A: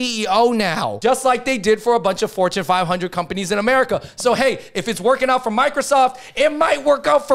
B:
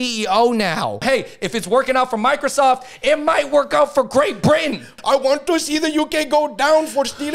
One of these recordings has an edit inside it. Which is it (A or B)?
B